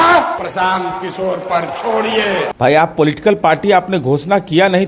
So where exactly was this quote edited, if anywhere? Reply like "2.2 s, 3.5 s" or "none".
none